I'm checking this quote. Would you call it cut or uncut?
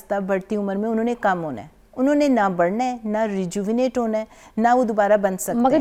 uncut